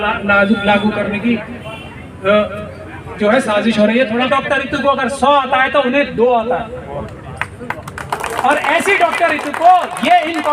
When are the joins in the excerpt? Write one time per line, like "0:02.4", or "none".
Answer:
0:04.3